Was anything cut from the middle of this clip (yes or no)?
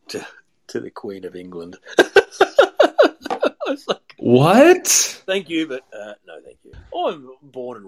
no